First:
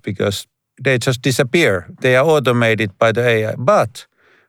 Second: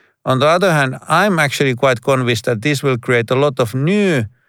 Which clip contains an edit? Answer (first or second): first